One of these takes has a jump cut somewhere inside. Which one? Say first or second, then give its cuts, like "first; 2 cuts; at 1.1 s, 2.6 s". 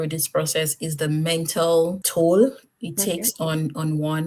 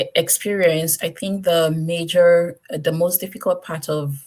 first; 1 cut; at 2.0 s